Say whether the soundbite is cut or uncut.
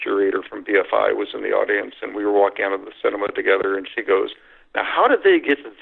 uncut